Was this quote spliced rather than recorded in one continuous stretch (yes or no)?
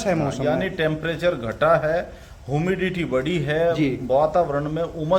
no